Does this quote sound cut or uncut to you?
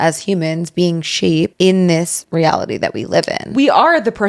cut